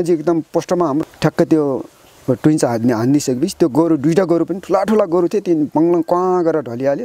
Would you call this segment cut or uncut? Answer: cut